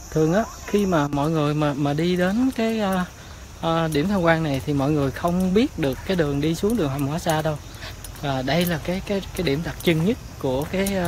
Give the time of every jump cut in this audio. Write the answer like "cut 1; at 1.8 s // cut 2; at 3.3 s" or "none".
none

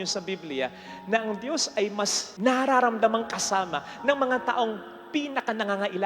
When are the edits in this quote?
cut 1; at 2.2 s

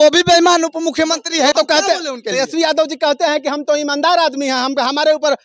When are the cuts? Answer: cut 1; at 1.5 s

